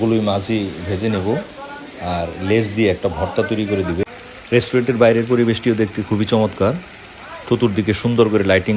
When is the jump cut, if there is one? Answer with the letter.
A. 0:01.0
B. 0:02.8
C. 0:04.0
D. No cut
C